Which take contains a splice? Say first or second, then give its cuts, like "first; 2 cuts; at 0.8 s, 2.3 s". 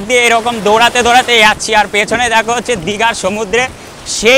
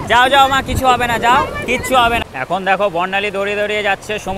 second; 1 cut; at 2.2 s